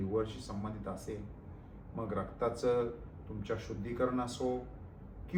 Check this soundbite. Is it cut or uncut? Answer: uncut